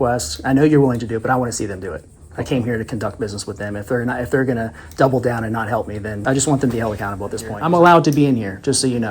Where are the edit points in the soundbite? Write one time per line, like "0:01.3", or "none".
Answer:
0:06.1
0:07.5